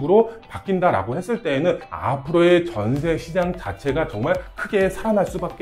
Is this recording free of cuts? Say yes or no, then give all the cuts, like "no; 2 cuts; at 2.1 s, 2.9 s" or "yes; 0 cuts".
no; 1 cut; at 1.9 s